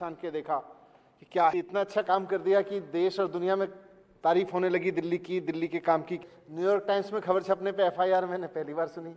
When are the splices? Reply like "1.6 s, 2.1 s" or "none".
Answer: 1.5 s, 6.2 s